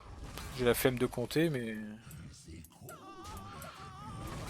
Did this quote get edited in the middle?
no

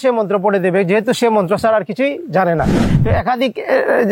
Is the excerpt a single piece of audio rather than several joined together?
no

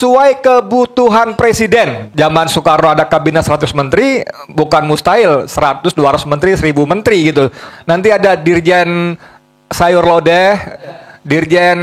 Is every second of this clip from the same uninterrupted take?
no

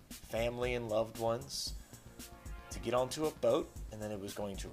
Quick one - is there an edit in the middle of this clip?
yes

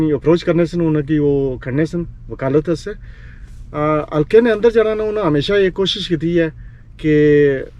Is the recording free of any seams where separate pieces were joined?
yes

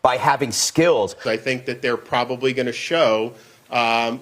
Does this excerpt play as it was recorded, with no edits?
no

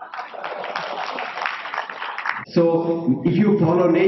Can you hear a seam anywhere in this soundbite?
yes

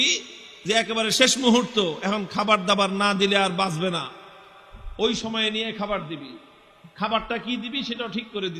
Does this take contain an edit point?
no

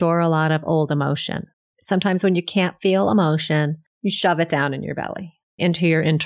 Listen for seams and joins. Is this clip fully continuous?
no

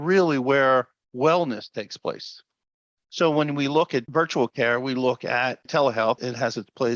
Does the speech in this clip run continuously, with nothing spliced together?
no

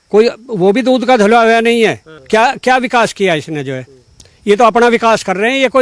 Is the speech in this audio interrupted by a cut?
yes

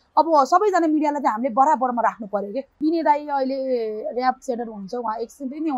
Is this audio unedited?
no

